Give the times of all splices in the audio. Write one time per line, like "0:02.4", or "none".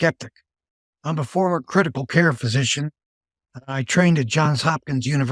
none